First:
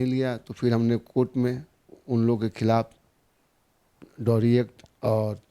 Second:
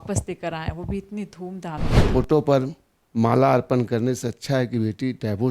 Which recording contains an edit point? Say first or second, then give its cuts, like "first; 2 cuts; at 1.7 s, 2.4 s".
second; 1 cut; at 1.9 s